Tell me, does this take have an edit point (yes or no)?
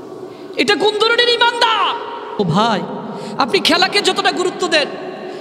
yes